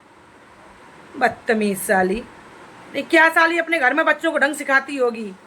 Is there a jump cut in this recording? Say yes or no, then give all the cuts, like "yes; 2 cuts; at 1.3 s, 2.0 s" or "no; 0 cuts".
no; 0 cuts